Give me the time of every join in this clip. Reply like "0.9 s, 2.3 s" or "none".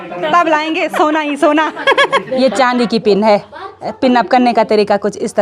2.3 s